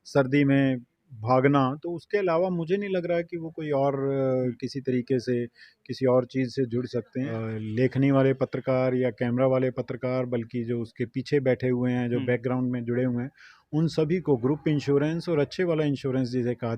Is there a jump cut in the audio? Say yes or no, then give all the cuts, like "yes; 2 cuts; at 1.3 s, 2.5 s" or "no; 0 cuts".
yes; 1 cut; at 7.4 s